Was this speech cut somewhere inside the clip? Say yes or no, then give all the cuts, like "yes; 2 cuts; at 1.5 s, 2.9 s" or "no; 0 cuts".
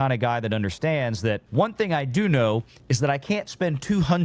yes; 1 cut; at 1.4 s